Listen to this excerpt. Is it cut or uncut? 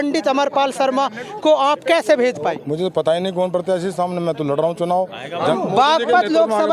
cut